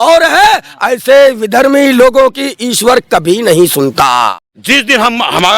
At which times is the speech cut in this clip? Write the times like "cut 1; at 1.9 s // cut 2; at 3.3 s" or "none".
cut 1; at 4.3 s